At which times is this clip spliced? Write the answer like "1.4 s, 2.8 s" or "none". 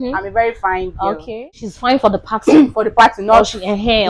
1.6 s